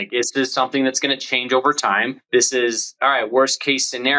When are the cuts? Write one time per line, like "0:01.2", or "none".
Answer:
0:02.2